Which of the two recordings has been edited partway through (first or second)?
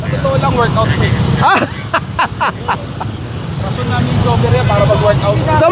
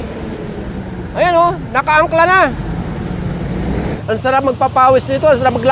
second